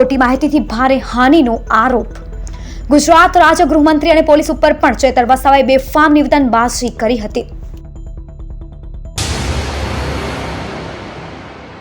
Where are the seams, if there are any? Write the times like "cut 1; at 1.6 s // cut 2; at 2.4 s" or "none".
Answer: cut 1; at 9.0 s